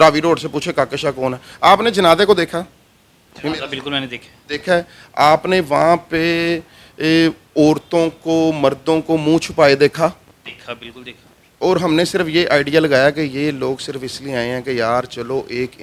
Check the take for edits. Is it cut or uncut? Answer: uncut